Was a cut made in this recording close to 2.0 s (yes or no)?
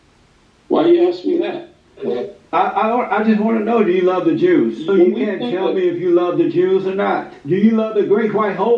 no